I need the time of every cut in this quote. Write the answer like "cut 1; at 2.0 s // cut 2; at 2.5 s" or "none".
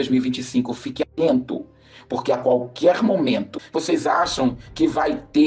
cut 1; at 3.6 s